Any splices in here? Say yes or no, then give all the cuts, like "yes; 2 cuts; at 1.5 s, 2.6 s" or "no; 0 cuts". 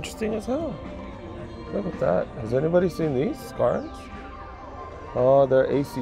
no; 0 cuts